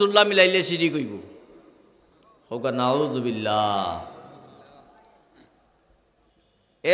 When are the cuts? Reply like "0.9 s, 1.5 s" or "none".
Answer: none